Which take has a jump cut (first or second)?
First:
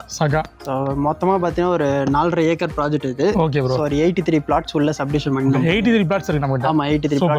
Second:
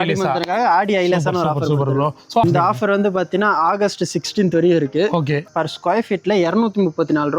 second